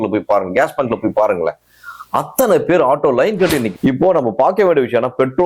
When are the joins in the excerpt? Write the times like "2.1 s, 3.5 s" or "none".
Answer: 3.7 s

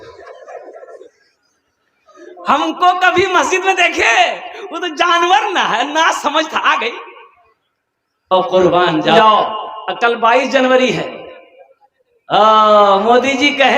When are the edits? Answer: 9.2 s

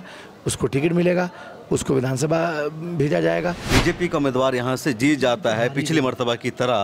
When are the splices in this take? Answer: 3.7 s

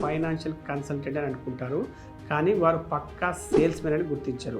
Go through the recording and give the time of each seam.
none

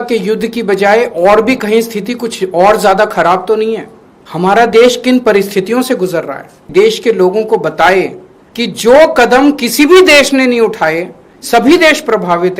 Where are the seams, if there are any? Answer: 6.6 s

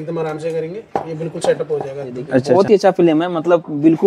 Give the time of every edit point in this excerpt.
2.5 s

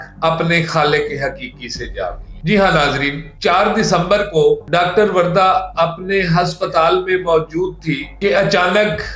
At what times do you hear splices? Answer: none

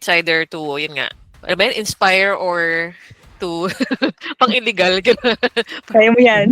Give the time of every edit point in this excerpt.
1.4 s

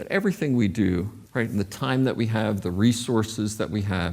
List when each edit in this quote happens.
1.2 s

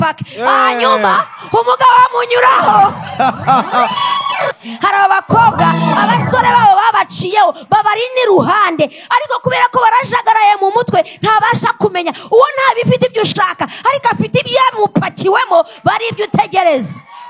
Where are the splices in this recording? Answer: 4.5 s

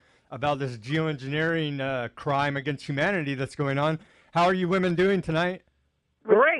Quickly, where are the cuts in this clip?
4.2 s

